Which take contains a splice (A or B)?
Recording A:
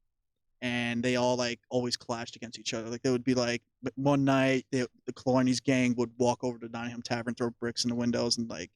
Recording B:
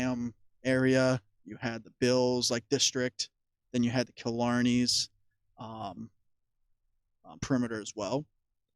B